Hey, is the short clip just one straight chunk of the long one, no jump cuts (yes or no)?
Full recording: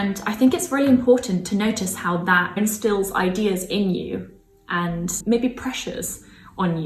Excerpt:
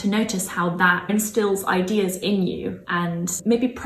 no